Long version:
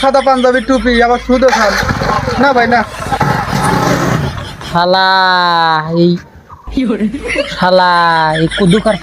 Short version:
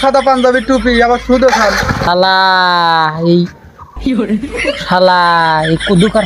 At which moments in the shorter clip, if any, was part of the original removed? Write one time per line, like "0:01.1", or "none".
0:02.0

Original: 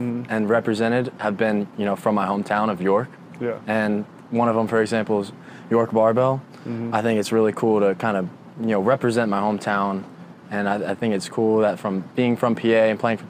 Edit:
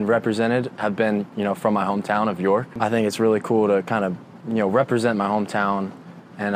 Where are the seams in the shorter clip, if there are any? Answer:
0:02.7

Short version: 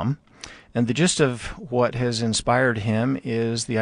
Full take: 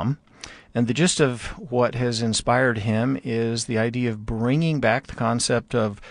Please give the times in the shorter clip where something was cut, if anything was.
none

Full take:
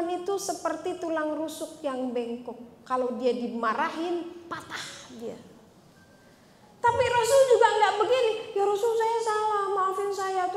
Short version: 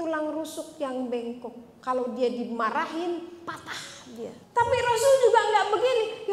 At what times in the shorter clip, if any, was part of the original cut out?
0:04.4

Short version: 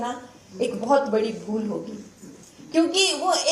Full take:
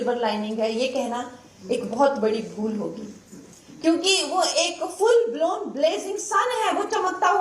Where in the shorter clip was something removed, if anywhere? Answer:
none

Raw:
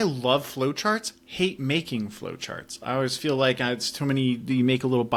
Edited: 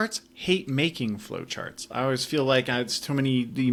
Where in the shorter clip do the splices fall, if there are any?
none

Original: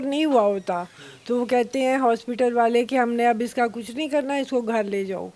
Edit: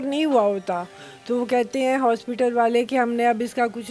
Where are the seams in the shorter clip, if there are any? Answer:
none

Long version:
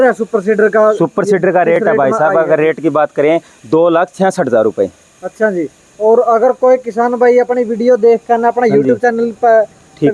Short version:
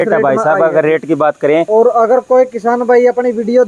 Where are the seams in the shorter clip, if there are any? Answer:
0:01.7

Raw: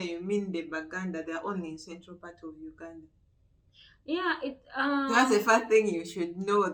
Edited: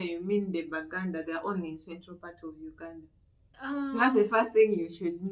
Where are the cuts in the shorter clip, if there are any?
0:03.5

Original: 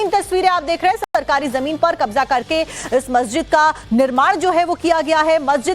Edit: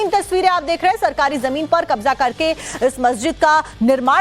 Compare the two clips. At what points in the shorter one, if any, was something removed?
0:01.0

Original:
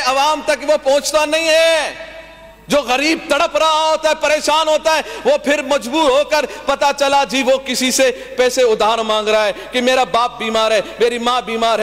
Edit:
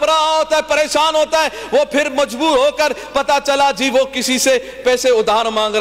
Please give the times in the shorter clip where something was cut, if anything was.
none

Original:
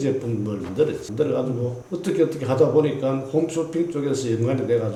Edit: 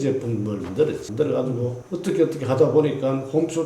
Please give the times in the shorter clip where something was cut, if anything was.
none

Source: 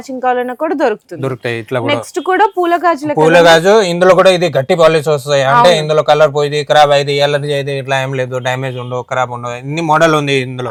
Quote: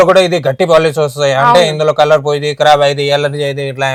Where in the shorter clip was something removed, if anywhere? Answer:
none

